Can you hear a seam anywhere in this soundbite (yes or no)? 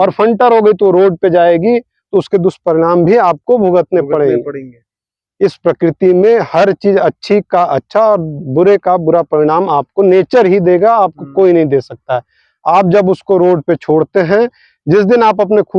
no